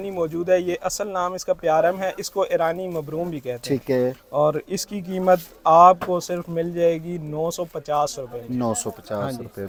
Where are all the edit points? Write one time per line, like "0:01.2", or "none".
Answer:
none